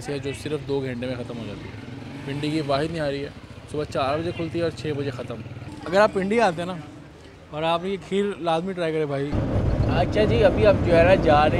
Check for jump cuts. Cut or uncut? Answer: cut